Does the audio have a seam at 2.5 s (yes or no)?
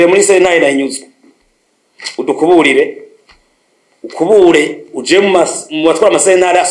no